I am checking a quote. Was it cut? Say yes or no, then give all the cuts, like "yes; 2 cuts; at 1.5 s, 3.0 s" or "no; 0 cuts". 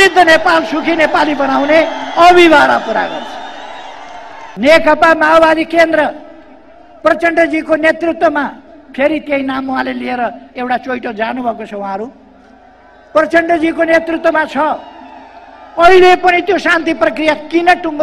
yes; 1 cut; at 4.5 s